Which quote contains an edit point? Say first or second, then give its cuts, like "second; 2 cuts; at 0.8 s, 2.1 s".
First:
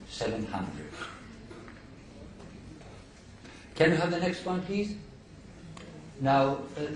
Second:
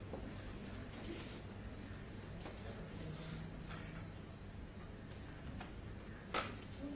second; 1 cut; at 3.8 s